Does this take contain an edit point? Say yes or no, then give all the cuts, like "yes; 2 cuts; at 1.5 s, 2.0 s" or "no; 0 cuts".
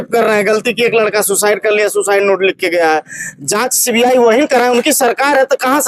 no; 0 cuts